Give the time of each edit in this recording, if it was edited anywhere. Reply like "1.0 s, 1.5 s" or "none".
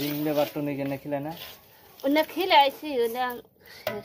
none